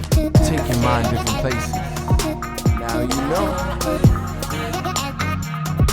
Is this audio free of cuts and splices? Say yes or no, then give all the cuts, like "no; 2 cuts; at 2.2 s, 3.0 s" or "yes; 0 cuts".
yes; 0 cuts